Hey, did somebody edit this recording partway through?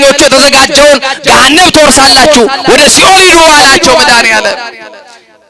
no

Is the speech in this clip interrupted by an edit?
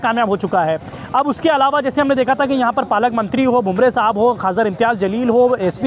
no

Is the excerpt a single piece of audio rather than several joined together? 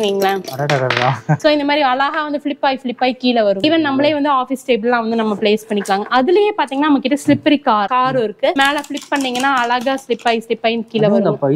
no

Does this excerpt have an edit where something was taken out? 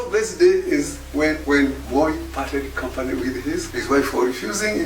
yes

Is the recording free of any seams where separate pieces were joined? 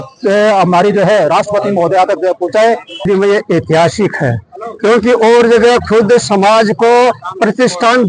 no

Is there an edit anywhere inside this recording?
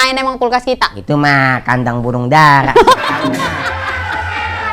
no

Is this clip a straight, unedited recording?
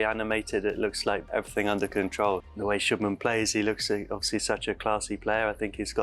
no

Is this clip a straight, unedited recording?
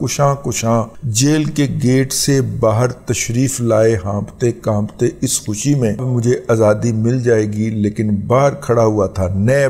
no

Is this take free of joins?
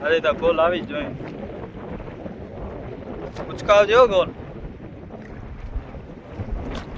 yes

